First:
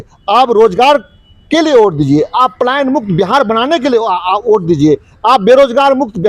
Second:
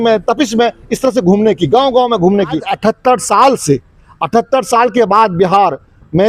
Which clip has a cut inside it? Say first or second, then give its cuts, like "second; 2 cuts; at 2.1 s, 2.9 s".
second; 1 cut; at 2.7 s